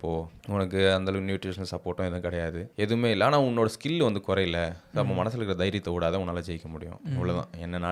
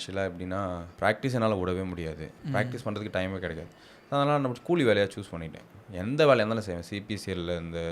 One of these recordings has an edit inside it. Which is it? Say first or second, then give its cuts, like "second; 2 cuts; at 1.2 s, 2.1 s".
second; 1 cut; at 2.3 s